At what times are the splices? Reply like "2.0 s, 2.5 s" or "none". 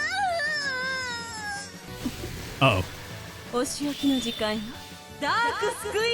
1.9 s